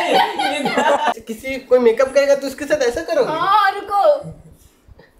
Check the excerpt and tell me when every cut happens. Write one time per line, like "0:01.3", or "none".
0:01.2